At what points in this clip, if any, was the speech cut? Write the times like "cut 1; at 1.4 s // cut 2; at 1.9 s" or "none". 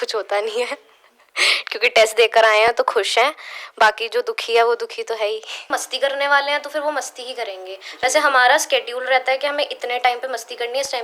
cut 1; at 5.7 s